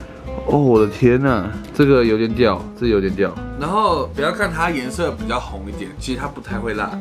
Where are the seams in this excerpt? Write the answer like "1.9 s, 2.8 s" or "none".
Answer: 3.5 s